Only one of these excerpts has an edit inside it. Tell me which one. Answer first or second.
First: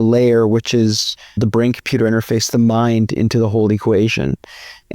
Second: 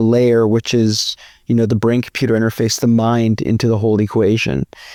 first